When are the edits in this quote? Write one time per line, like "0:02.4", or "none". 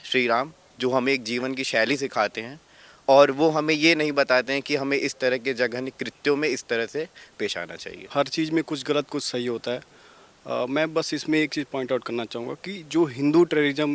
0:08.0

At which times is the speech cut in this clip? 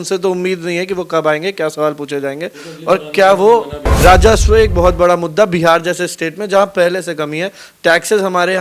0:03.8

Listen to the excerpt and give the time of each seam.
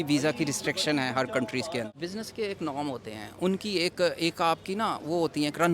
0:01.9

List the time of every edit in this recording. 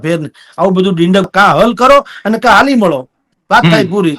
0:01.3

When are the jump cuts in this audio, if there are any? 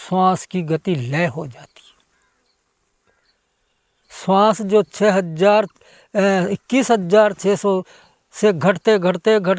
none

